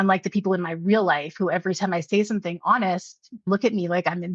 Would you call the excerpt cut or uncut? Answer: cut